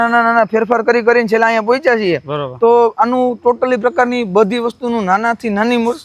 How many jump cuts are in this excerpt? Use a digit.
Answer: 0